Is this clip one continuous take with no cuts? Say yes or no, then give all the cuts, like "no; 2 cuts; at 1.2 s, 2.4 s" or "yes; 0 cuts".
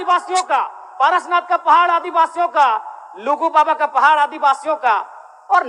yes; 0 cuts